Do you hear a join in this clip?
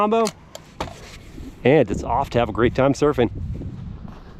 no; 0 cuts

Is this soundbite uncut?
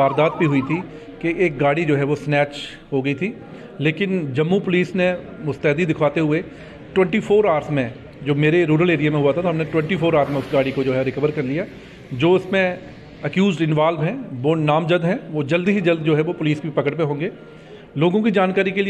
yes; 0 cuts

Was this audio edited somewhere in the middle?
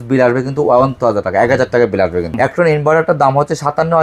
yes; 1 cut; at 2.3 s

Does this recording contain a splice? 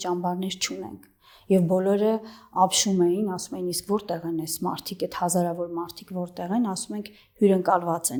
no; 0 cuts

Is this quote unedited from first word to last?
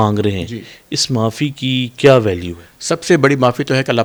yes; 0 cuts

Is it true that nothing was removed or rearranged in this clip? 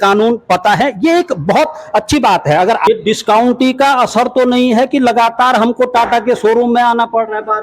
no; 1 cut; at 2.9 s

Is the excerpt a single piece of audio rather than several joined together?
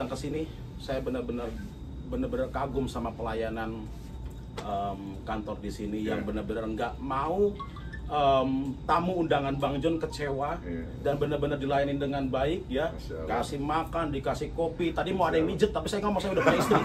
yes; 0 cuts

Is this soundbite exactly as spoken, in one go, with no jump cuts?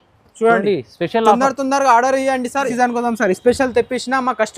no; 1 cut; at 2.7 s

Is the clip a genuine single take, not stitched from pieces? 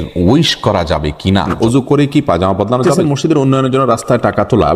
no; 2 cuts; at 1.5 s, 2.9 s

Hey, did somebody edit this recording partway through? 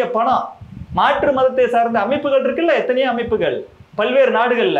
no; 0 cuts

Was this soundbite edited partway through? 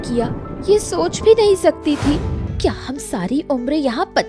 yes; 1 cut; at 2.4 s

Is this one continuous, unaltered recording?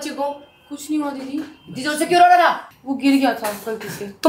yes; 0 cuts

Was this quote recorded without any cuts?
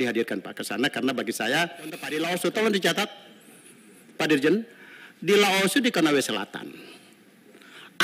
no; 1 cut; at 2.1 s

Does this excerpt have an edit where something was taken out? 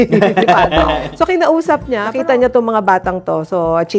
yes; 1 cut; at 2.1 s

